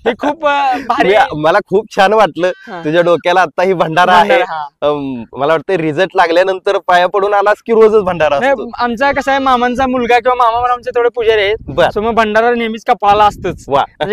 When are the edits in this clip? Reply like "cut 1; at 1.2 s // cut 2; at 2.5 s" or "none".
none